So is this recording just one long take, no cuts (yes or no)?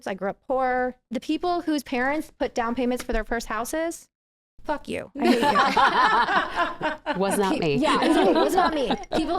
no